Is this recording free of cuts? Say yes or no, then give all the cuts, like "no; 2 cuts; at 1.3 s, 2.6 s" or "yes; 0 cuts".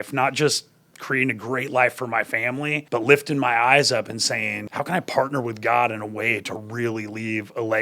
no; 2 cuts; at 2.8 s, 4.6 s